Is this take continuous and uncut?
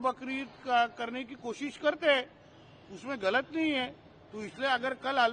yes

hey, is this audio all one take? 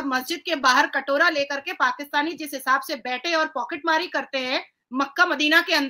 yes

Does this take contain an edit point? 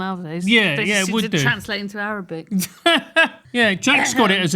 yes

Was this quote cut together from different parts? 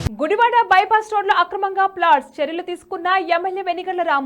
no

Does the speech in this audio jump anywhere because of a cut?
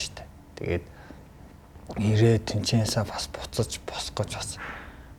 no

